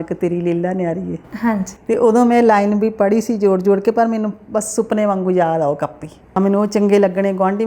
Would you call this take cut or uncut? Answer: cut